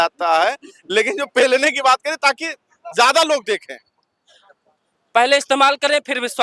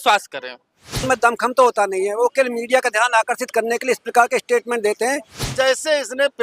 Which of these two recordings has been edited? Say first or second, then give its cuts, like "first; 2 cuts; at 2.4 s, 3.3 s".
second; 2 cuts; at 1.0 s, 5.5 s